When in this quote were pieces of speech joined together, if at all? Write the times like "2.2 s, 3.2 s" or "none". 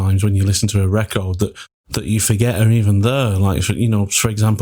none